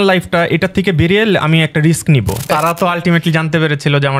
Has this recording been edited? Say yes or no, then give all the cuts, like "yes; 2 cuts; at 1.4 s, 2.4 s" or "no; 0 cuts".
yes; 1 cut; at 2.4 s